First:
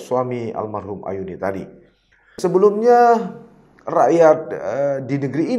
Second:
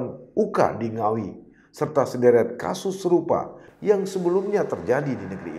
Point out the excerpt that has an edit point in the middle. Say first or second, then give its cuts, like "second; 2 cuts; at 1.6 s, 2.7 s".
first; 1 cut; at 2.3 s